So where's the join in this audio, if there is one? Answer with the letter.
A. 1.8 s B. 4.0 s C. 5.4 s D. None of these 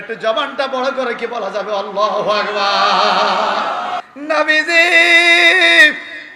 B